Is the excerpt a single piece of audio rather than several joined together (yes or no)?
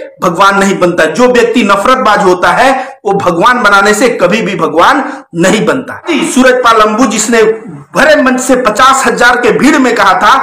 no